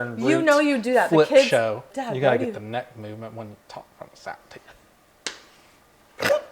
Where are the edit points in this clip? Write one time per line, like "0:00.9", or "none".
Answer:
0:01.9